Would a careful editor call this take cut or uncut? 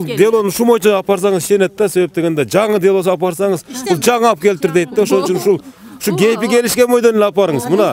uncut